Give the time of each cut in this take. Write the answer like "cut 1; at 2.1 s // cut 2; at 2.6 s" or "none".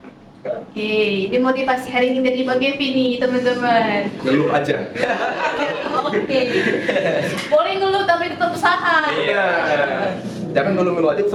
none